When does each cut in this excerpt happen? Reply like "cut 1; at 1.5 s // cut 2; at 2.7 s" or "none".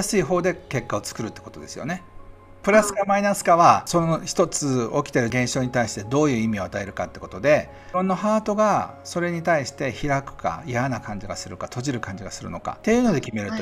cut 1; at 2.6 s // cut 2; at 3.8 s // cut 3; at 5.3 s // cut 4; at 7.8 s // cut 5; at 12.8 s